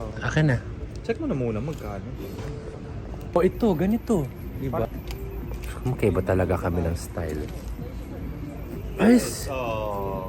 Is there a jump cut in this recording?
yes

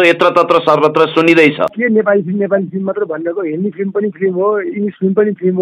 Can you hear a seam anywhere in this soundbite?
yes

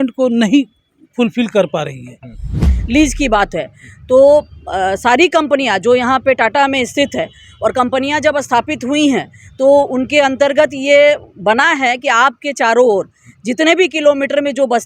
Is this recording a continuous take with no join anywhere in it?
no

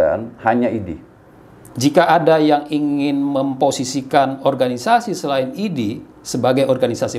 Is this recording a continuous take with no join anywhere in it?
no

